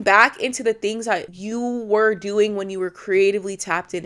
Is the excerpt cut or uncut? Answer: cut